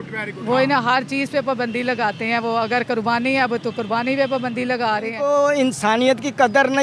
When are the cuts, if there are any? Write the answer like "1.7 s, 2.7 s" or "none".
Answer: 5.1 s